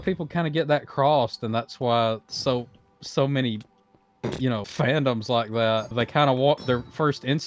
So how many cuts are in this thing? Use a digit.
2